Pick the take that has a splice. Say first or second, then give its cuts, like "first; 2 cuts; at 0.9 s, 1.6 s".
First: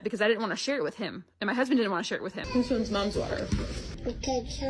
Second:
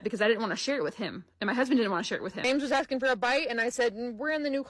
first; 2 cuts; at 2.3 s, 3.6 s